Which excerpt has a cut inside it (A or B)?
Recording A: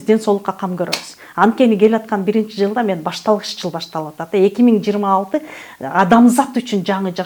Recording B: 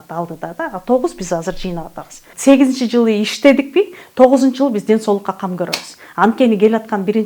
B